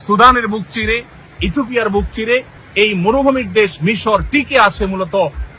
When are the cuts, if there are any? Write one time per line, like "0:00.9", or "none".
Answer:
0:02.6